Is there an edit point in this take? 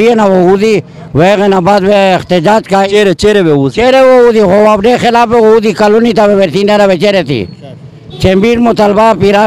no; 0 cuts

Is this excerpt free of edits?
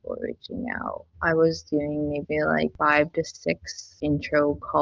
no; 2 cuts; at 2.8 s, 3.9 s

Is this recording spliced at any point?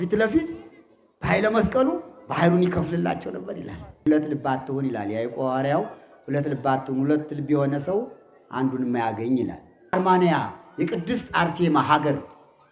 yes; 2 cuts; at 4.0 s, 9.9 s

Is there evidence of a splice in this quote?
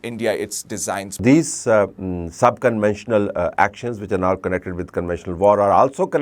yes; 1 cut; at 1.2 s

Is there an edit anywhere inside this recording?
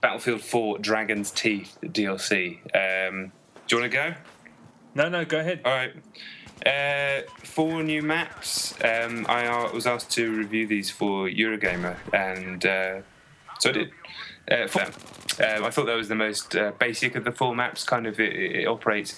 no; 0 cuts

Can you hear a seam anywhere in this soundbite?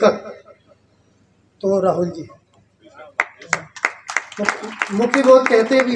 no; 0 cuts

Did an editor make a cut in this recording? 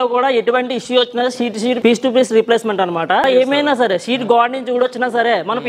yes; 2 cuts; at 1.8 s, 3.2 s

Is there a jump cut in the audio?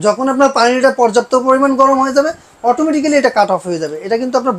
no; 0 cuts

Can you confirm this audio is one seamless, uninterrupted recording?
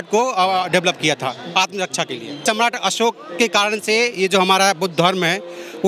no; 1 cut; at 2.4 s

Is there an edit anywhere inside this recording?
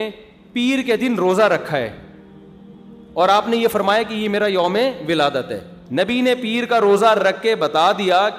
yes; 1 cut; at 5.7 s

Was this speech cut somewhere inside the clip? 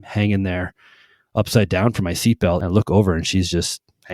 yes; 1 cut; at 2.6 s

